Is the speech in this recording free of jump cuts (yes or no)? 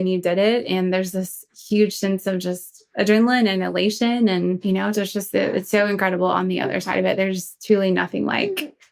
no